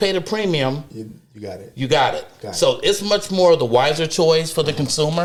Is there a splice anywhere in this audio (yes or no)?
no